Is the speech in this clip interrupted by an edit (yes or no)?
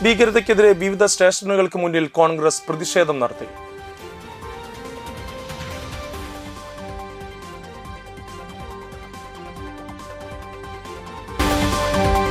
no